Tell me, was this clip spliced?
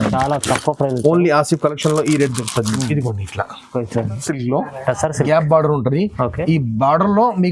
yes; 1 cut; at 4.2 s

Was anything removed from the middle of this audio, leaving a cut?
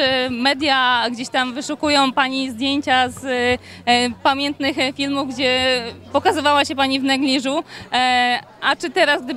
no; 0 cuts

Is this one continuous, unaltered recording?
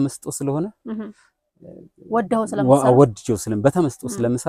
yes; 0 cuts

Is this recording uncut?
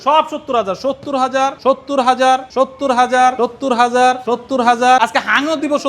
no; 5 cuts; at 1.6 s, 2.5 s, 3.4 s, 4.2 s, 5.0 s

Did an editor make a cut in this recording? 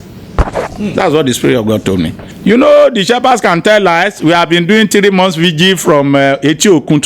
yes; 1 cut; at 2.2 s

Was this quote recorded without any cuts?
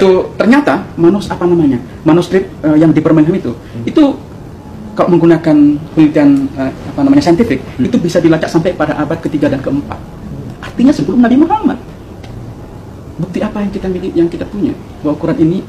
yes; 0 cuts

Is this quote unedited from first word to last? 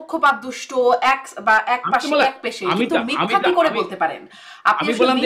yes; 0 cuts

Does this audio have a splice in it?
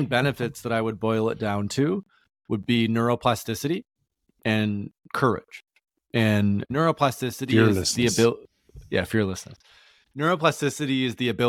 no; 0 cuts

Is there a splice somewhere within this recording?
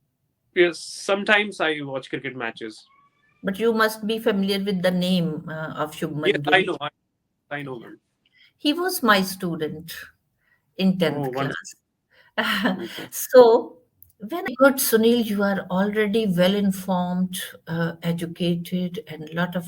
yes; 1 cut; at 14.5 s

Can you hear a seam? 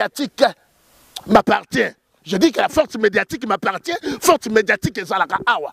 no; 0 cuts

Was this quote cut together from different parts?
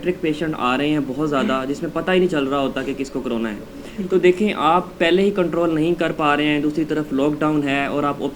no; 0 cuts

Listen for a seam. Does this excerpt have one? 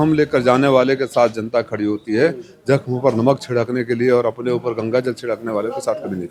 no; 0 cuts

